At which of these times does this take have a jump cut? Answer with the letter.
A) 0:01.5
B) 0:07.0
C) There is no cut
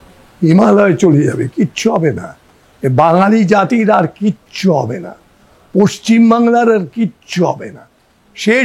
C